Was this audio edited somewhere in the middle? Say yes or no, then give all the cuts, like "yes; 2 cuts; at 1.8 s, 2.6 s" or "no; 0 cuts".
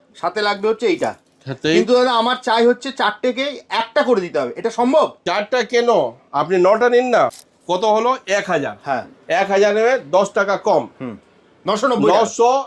yes; 2 cuts; at 5.2 s, 7.4 s